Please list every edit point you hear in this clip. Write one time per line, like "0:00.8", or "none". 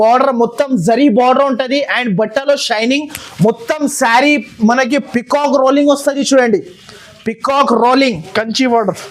none